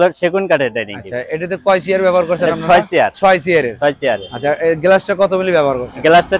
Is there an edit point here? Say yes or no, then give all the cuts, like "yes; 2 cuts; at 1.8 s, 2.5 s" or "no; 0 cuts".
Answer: no; 0 cuts